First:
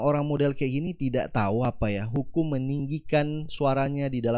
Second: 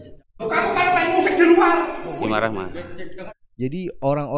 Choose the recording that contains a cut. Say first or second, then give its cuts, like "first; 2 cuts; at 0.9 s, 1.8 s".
second; 1 cut; at 3.3 s